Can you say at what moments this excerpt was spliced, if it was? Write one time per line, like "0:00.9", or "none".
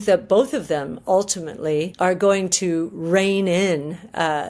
0:01.9